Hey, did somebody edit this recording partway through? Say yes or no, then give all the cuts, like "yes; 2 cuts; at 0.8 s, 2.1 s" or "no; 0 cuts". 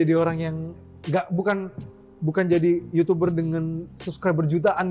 no; 0 cuts